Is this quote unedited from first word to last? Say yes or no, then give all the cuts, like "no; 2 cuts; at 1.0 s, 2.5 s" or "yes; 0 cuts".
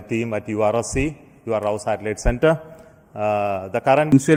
yes; 0 cuts